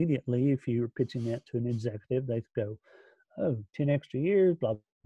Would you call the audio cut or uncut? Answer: uncut